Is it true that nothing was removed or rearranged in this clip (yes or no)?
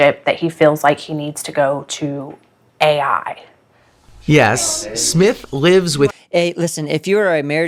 yes